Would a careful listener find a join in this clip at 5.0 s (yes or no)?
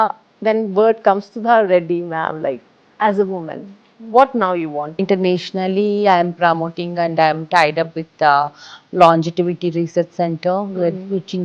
yes